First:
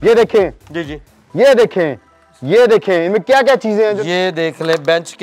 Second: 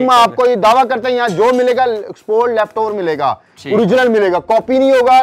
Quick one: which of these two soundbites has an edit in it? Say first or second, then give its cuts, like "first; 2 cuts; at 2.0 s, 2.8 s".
first; 1 cut; at 4.0 s